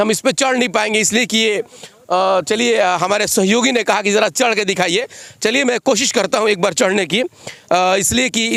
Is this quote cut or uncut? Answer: uncut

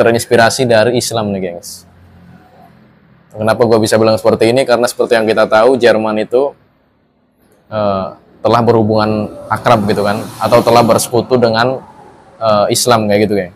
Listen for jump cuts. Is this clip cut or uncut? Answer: uncut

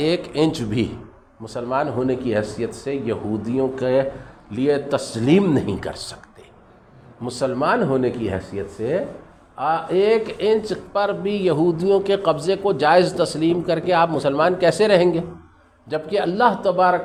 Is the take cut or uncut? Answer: uncut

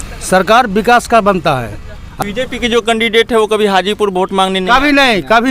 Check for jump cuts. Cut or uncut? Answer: cut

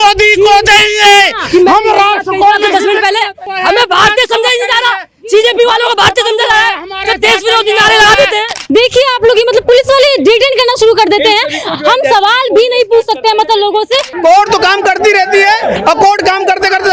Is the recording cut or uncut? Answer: cut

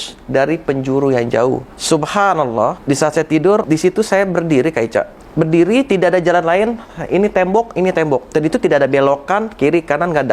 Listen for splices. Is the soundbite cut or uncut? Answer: cut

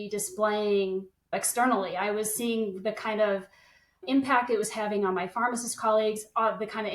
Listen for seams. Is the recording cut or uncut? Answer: cut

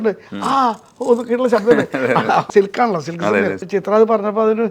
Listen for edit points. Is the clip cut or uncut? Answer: cut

